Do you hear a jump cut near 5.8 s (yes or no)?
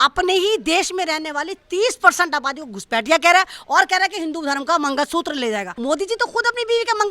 yes